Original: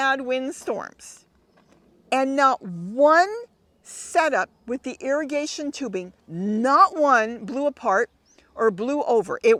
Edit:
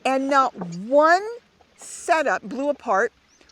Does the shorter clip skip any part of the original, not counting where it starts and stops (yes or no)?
yes